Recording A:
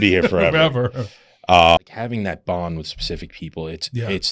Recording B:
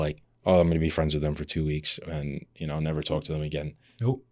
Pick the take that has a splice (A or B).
A